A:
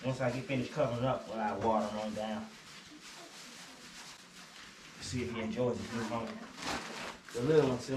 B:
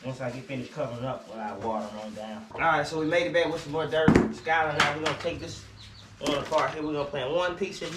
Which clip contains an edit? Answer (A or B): B